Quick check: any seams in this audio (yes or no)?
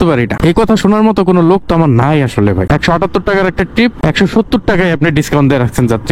yes